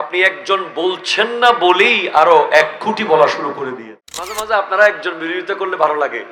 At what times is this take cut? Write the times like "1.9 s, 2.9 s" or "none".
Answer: 3.7 s